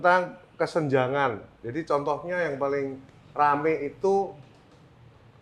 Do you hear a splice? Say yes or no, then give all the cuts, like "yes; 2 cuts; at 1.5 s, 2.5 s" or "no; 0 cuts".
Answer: no; 0 cuts